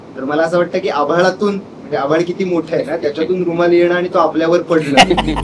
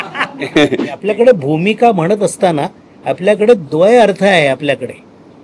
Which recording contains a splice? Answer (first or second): second